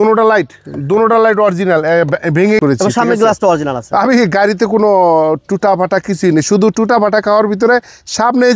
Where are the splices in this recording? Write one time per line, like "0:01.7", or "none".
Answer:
0:02.6